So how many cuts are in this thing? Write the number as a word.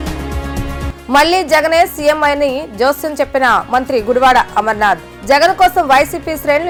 zero